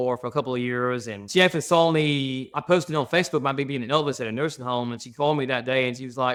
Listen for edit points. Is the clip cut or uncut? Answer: uncut